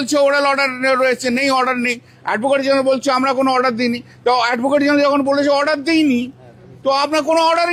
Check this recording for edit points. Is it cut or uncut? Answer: uncut